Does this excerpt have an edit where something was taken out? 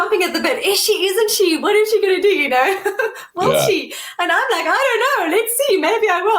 no; 0 cuts

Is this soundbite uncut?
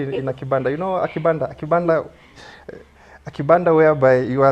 yes; 0 cuts

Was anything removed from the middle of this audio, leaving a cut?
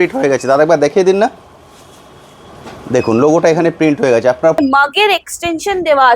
yes; 1 cut; at 4.6 s

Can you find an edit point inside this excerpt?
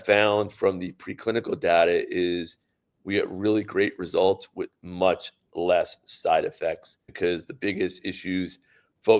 yes; 1 cut; at 7.1 s

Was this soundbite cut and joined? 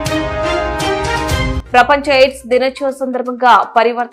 yes; 1 cut; at 1.6 s

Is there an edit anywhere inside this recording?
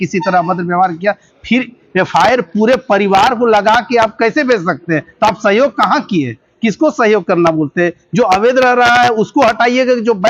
no; 0 cuts

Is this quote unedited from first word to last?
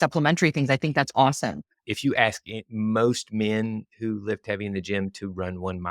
no; 1 cut; at 1.7 s

